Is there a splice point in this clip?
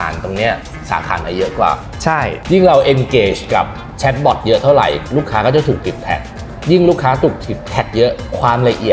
yes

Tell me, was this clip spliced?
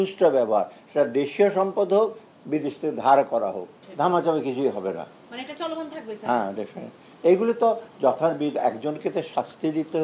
yes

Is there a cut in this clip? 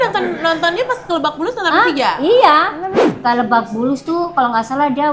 yes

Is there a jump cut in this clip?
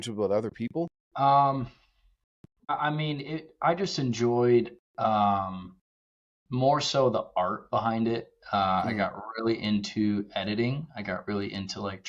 yes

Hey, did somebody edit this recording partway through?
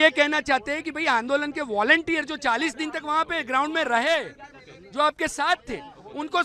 no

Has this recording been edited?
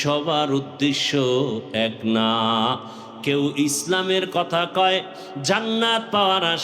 no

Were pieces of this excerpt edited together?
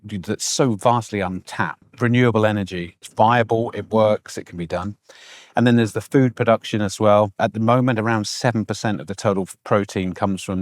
yes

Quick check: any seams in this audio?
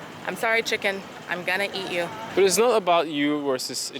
yes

